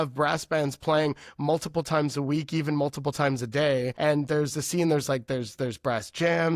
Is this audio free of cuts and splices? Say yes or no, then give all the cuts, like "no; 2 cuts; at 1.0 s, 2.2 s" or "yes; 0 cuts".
no; 1 cut; at 3.9 s